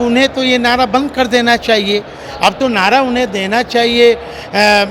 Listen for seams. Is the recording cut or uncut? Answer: uncut